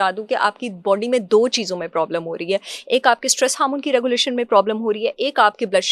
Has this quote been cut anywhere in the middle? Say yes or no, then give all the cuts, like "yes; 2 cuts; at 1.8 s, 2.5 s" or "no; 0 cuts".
no; 0 cuts